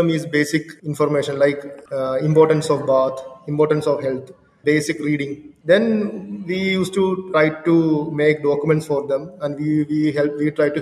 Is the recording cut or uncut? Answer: cut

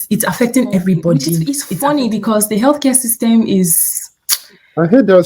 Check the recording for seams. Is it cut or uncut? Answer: cut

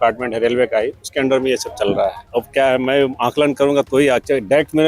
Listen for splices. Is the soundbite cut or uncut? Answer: cut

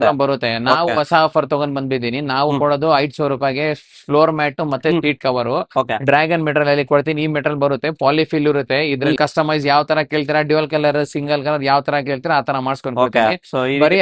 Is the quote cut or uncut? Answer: cut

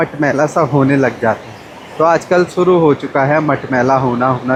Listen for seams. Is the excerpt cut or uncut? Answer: uncut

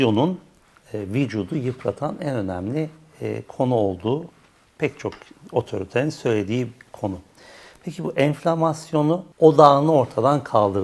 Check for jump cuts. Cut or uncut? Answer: uncut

